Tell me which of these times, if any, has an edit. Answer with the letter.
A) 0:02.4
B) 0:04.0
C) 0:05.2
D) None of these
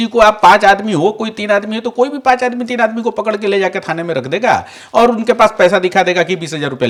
D